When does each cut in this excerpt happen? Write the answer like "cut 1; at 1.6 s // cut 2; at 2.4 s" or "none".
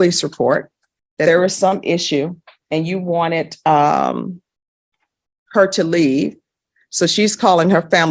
cut 1; at 1.2 s